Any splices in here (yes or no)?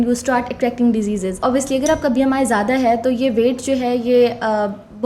yes